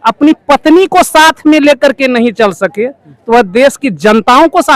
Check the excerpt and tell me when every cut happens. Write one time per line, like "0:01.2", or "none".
none